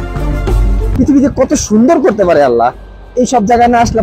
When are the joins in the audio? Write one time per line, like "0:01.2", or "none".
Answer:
0:01.0